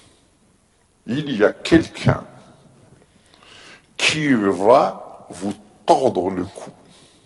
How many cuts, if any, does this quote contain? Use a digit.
0